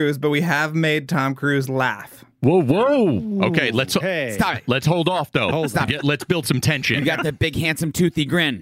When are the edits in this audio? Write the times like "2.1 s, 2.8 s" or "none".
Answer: 7.0 s